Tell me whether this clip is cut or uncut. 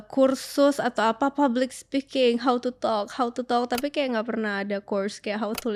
uncut